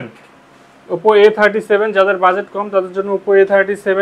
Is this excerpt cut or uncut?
uncut